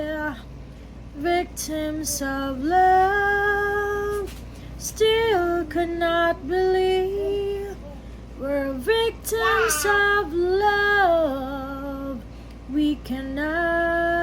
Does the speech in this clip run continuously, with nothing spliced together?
yes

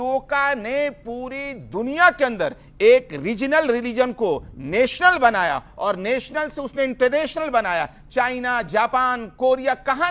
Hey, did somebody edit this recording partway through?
no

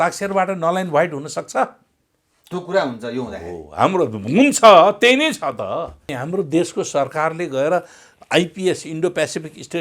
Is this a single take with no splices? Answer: no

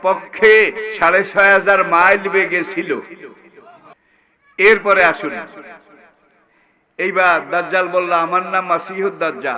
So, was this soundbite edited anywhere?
yes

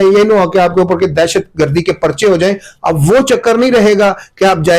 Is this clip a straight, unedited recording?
yes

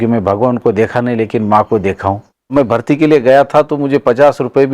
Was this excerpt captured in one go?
no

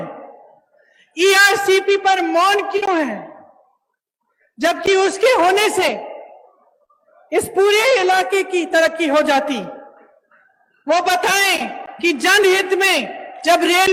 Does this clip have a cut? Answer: no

